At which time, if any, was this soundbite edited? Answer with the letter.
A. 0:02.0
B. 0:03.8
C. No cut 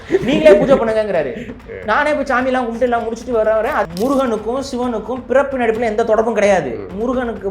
B